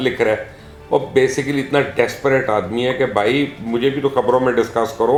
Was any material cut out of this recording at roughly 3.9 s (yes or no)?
no